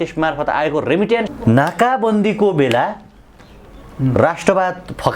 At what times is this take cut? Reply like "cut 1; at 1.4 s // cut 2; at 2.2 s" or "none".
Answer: cut 1; at 1.3 s